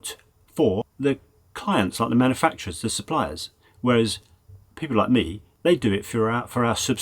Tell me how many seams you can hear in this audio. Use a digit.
1